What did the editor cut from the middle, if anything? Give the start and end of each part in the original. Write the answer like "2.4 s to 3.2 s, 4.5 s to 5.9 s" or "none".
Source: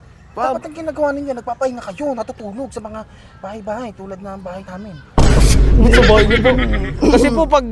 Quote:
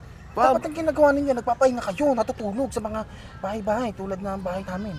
none